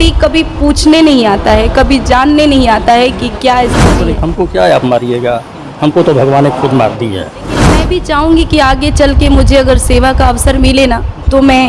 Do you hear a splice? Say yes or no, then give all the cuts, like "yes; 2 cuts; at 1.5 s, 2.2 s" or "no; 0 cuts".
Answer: yes; 2 cuts; at 4.1 s, 7.8 s